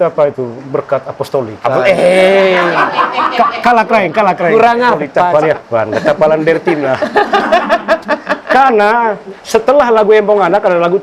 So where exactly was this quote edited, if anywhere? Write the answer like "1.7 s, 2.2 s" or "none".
5.2 s